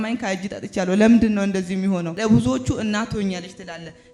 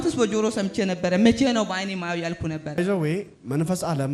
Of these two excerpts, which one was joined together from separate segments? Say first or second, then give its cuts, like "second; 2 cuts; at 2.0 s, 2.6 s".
first; 1 cut; at 2.1 s